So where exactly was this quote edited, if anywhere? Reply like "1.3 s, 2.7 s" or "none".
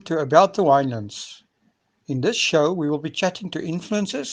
none